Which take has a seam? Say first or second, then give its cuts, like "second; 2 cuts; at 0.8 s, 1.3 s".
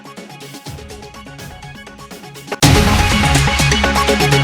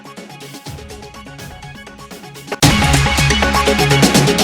second; 1 cut; at 2.7 s